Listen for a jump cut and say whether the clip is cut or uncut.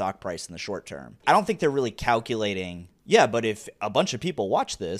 cut